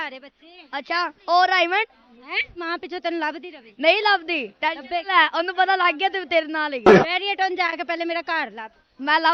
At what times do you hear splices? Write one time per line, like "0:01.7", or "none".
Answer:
0:02.5
0:07.0

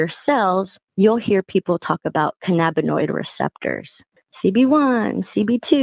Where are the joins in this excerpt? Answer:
none

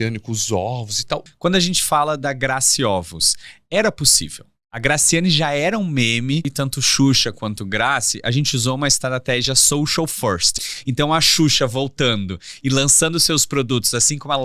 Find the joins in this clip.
0:01.3
0:06.5
0:10.6

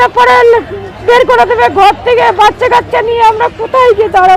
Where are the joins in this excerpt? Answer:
none

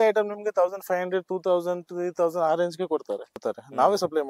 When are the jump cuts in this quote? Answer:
0:03.4

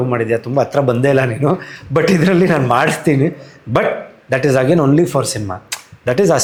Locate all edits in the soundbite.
none

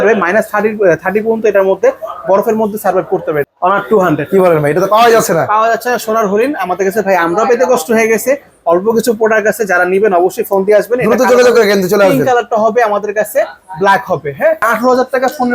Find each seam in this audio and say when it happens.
0:03.5
0:14.6

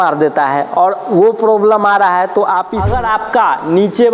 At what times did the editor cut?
0:02.8

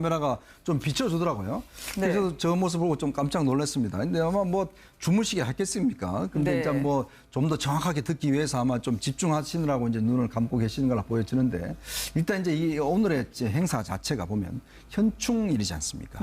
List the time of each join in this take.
0:11.8

